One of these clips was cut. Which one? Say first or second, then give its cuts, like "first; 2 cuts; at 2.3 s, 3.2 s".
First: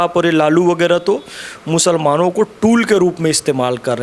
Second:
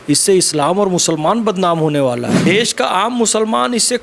second; 1 cut; at 2.4 s